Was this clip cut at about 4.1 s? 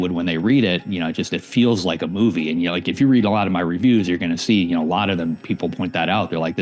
no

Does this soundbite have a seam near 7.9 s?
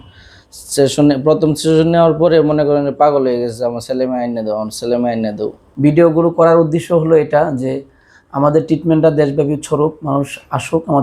no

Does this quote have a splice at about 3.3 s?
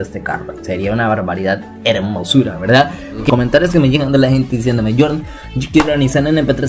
yes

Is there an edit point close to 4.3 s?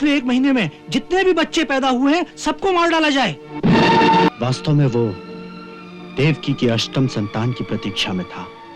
yes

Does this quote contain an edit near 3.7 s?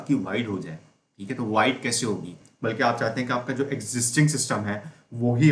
no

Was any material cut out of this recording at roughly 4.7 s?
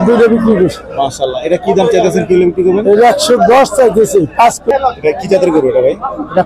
yes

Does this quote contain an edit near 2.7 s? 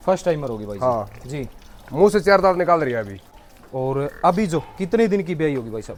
no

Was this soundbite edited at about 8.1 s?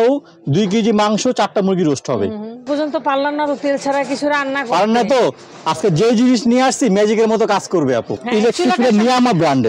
yes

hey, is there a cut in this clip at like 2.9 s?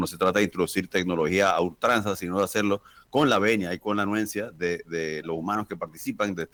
no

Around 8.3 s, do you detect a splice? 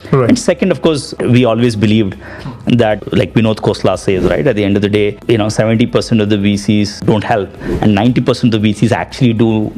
no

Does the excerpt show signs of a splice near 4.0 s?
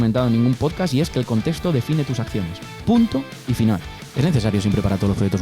yes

